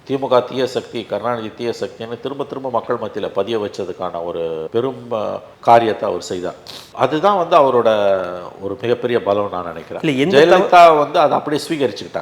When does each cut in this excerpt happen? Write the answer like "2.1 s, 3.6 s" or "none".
none